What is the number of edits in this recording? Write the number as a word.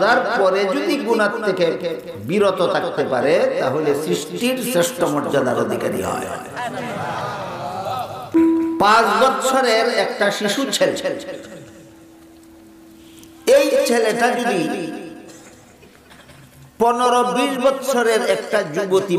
one